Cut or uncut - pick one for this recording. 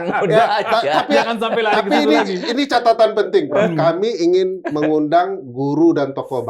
uncut